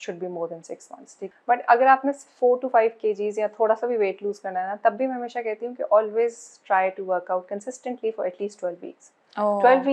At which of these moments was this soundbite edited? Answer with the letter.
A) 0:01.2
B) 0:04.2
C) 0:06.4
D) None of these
A